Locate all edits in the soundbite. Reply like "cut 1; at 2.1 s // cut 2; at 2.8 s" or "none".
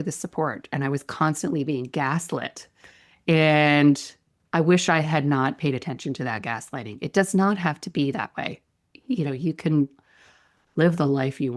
none